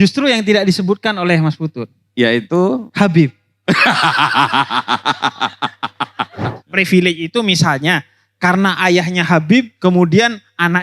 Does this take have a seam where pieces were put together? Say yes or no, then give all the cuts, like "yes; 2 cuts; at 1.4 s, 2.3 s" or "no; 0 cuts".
yes; 1 cut; at 6.6 s